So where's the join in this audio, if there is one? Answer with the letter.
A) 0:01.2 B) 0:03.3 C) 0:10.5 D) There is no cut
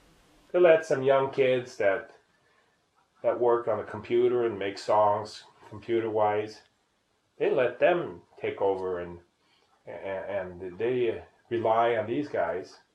B